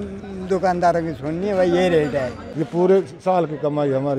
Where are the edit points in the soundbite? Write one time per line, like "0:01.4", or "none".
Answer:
0:02.4